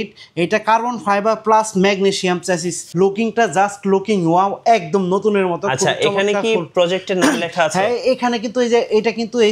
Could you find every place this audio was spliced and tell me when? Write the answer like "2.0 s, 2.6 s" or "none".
2.8 s